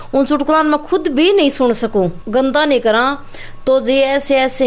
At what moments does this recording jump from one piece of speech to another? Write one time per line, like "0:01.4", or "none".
0:02.2